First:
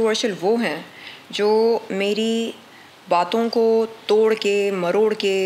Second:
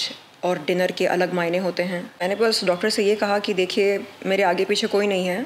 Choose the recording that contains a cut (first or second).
second